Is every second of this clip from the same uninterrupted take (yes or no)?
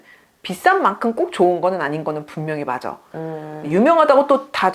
yes